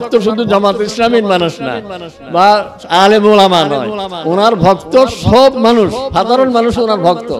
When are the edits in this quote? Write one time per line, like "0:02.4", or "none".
none